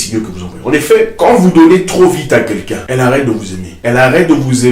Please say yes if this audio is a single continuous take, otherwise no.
no